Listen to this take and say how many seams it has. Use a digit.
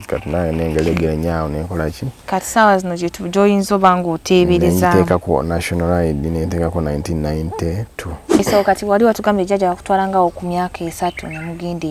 1